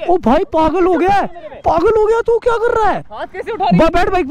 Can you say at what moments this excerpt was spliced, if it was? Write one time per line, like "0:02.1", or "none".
none

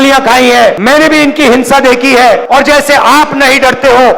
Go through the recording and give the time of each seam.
0:00.8
0:02.4

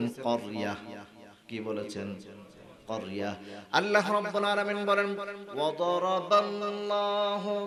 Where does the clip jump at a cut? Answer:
none

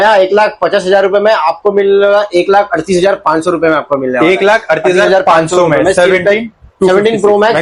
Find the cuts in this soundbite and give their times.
none

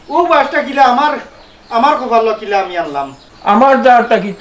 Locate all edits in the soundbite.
0:03.2

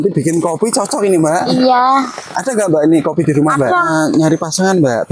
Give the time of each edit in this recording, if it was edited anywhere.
0:03.9

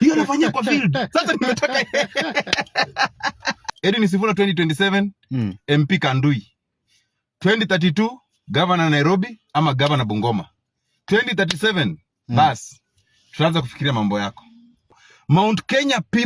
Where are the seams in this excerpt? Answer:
0:03.7
0:14.9

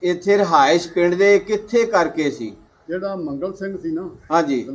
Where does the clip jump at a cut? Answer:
0:02.7

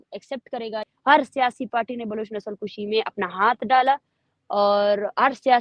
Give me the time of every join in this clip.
0:00.9

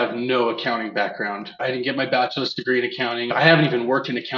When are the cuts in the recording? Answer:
0:01.6
0:03.3

